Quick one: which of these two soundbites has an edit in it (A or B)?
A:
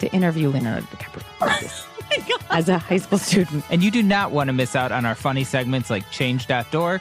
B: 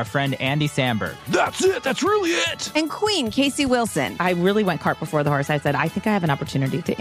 A